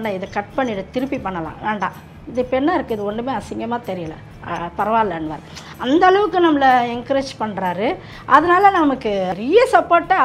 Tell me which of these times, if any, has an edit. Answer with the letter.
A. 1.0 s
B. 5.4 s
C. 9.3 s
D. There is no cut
C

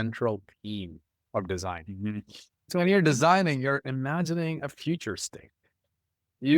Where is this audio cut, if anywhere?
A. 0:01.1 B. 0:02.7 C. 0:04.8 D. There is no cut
B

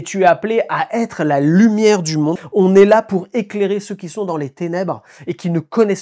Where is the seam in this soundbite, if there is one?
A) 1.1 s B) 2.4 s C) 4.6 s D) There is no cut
B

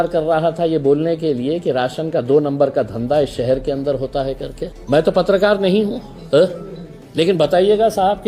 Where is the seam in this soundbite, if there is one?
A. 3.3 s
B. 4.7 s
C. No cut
B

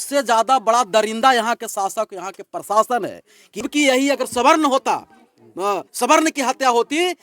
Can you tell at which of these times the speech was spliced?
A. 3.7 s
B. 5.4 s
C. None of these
A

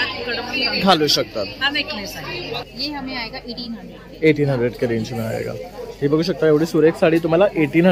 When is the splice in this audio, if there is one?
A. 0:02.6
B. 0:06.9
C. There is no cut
A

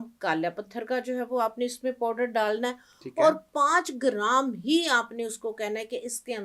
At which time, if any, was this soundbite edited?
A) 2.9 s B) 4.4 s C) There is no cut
C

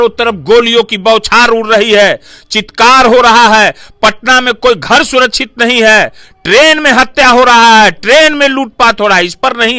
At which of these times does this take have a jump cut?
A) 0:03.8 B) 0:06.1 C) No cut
C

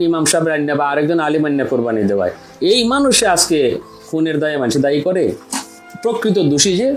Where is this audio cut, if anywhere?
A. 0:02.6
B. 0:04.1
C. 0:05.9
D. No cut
C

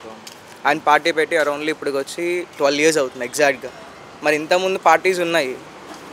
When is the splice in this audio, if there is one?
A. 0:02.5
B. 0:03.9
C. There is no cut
C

